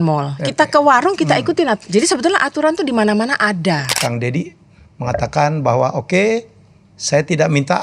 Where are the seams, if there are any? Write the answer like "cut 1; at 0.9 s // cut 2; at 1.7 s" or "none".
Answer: cut 1; at 3.9 s